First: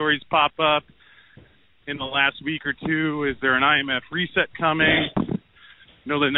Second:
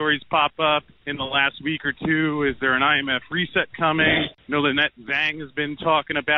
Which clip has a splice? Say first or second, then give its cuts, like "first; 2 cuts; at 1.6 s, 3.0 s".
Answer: second; 2 cuts; at 1.0 s, 4.3 s